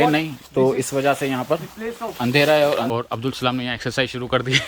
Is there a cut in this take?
yes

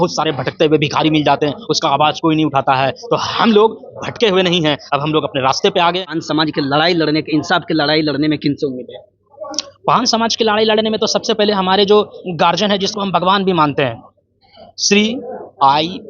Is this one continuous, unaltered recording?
no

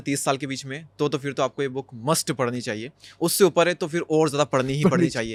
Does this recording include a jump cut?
no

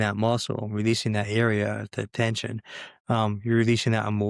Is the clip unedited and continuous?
yes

